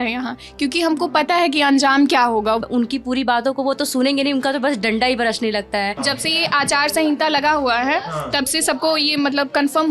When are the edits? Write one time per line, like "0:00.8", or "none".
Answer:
0:02.6
0:06.0